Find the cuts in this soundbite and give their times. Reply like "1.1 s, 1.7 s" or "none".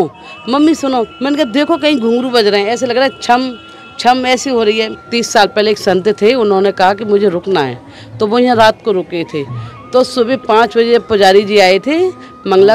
1.1 s, 4.9 s